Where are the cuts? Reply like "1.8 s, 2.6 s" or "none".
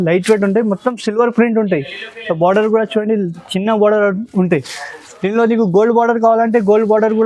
none